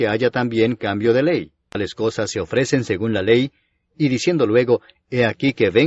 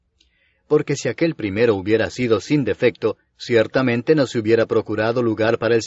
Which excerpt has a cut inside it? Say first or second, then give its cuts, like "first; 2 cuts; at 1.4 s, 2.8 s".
first; 1 cut; at 1.6 s